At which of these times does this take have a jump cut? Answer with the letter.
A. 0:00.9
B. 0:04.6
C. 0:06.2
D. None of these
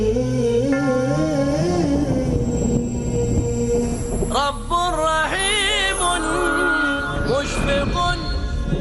D